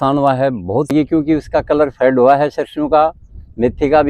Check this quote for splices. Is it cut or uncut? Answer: cut